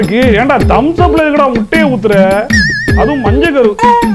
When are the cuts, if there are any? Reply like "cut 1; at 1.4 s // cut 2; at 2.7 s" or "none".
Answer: none